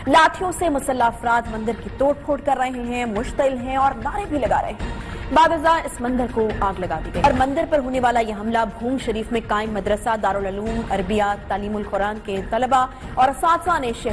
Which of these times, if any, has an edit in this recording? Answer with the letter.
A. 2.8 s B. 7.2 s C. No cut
B